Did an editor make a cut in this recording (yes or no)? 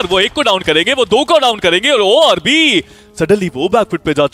no